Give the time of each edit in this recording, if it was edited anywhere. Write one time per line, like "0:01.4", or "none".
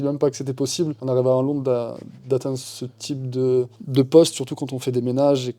none